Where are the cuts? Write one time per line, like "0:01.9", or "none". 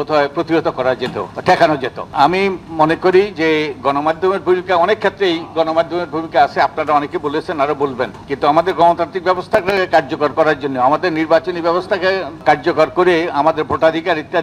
0:01.3
0:02.1
0:08.2
0:12.4